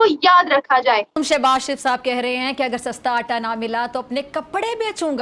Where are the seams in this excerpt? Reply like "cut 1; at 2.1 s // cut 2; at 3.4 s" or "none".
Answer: cut 1; at 1.2 s